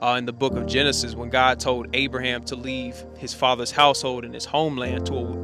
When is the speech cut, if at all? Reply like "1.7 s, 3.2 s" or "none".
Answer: none